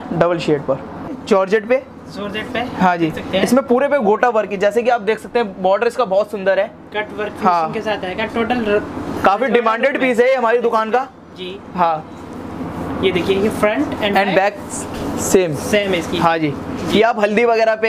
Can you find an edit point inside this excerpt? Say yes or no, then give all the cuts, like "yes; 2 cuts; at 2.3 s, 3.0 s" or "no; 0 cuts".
yes; 1 cut; at 1.1 s